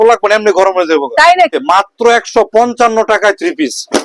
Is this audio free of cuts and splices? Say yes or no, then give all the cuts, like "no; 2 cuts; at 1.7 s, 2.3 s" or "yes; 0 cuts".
no; 1 cut; at 1.6 s